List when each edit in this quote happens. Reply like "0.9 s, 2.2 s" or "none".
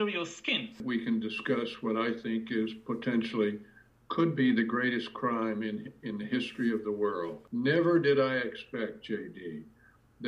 0.8 s, 7.4 s